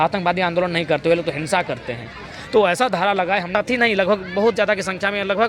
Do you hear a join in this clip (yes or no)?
yes